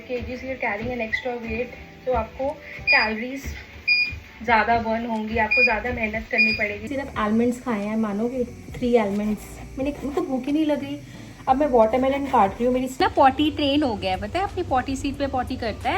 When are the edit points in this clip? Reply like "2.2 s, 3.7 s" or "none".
6.9 s, 13.0 s